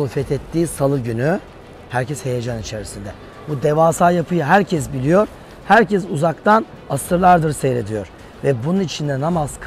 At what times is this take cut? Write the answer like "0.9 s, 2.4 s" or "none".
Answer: none

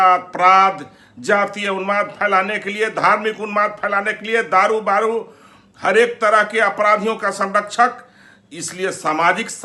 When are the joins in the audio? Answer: none

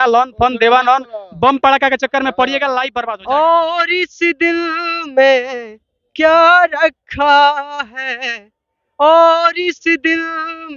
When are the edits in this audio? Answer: 3.0 s

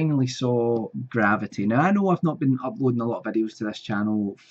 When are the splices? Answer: none

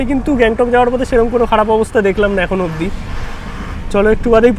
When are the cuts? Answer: none

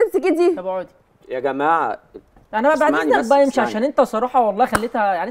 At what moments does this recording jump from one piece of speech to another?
none

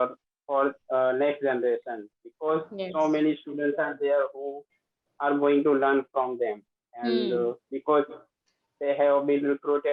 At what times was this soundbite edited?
none

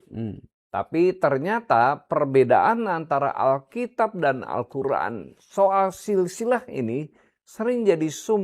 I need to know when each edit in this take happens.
none

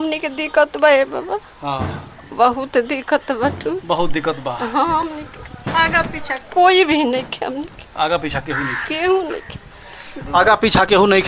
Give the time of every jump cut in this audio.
none

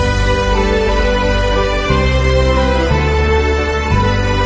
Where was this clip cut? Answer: none

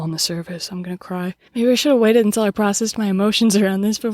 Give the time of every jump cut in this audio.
1.4 s

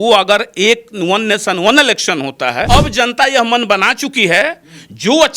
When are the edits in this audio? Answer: 2.6 s

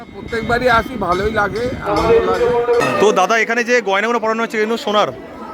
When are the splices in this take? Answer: 2.8 s

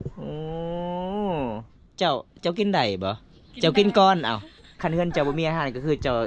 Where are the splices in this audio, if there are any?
4.7 s

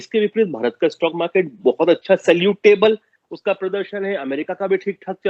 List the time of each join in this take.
none

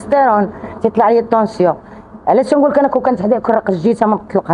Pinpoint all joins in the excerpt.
none

